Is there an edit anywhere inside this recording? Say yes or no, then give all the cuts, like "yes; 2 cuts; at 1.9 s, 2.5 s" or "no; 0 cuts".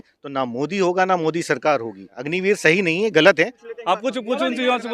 yes; 2 cuts; at 2.3 s, 3.7 s